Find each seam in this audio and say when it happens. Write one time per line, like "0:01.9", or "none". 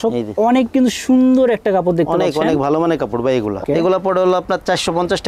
0:03.6